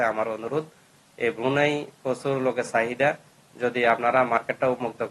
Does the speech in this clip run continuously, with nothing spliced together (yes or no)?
yes